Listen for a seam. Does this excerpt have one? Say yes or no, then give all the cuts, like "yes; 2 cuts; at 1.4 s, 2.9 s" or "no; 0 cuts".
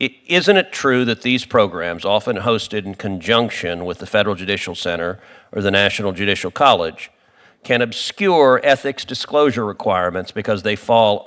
no; 0 cuts